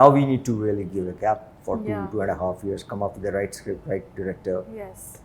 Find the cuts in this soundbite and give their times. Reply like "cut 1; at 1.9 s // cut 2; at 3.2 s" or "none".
none